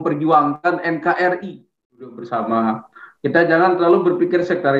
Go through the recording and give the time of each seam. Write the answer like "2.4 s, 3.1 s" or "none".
2.2 s